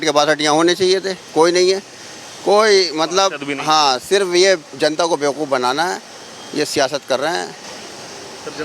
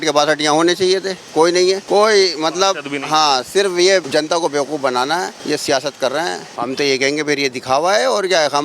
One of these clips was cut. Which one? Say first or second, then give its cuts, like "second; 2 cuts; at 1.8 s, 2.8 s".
second; 4 cuts; at 1.8 s, 4.1 s, 5.4 s, 6.5 s